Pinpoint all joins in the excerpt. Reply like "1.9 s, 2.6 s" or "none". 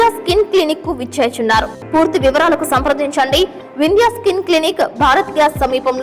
1.8 s